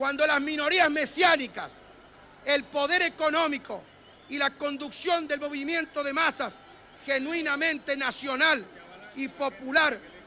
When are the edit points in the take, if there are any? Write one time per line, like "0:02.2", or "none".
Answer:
0:04.7